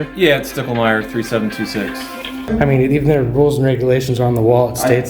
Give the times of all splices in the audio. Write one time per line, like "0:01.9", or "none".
0:02.3